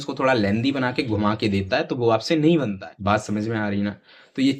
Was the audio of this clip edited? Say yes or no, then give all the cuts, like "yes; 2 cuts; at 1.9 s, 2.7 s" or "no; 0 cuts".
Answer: yes; 1 cut; at 2.9 s